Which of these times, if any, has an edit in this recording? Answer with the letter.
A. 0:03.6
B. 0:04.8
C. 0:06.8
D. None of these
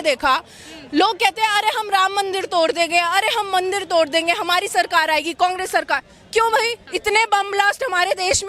C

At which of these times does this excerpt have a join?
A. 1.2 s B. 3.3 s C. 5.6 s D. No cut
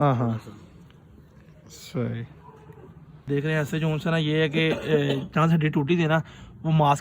B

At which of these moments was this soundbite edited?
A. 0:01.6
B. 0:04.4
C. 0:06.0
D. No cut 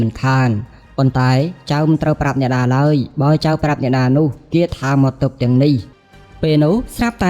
C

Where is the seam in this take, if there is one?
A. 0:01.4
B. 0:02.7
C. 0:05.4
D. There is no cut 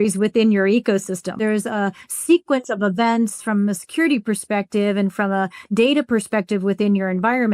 A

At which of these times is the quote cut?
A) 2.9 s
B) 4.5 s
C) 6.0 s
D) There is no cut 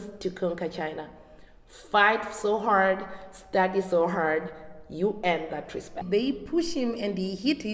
C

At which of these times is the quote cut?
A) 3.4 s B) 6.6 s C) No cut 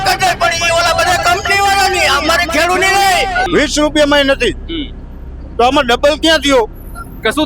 A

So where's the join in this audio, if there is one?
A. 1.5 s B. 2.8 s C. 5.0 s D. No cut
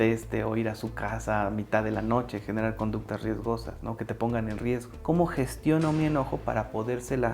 C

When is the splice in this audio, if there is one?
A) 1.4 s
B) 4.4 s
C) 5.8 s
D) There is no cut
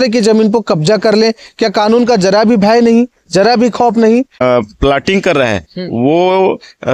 B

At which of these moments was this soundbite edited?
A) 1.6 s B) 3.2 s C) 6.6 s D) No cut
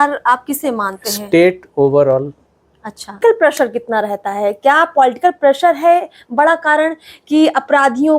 B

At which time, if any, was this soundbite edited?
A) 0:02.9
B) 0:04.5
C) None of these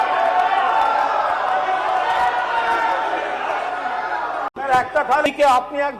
B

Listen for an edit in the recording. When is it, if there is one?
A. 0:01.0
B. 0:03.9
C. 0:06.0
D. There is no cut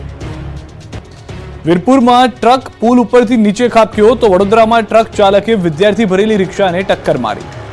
A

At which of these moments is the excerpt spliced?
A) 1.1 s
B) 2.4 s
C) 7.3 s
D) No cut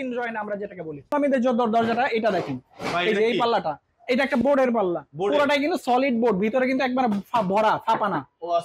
A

